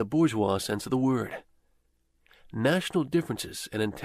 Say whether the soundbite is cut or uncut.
cut